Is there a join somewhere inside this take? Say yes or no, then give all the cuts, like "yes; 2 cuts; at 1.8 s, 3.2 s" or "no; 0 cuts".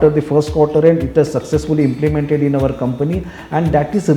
no; 0 cuts